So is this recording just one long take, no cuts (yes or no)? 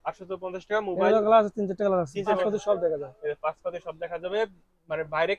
no